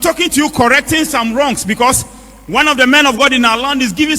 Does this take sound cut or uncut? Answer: uncut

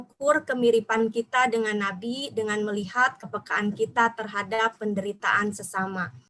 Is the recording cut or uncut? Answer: uncut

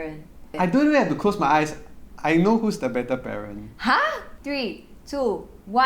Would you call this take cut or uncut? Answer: cut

